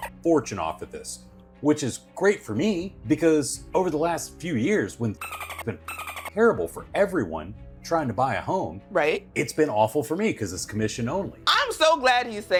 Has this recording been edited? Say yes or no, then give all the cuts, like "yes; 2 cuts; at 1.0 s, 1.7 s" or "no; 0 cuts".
no; 0 cuts